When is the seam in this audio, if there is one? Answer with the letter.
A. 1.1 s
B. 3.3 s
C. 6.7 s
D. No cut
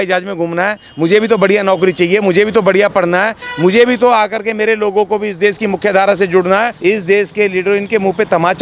C